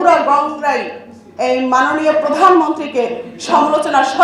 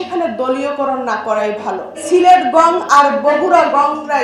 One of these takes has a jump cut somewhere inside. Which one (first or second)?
second